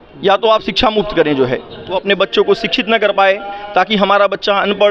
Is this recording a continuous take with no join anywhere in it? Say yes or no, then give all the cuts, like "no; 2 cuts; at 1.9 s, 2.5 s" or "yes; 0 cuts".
no; 1 cut; at 1.9 s